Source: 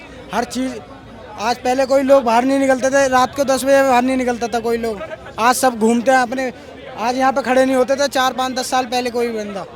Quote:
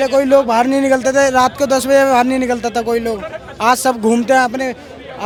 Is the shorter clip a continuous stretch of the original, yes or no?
yes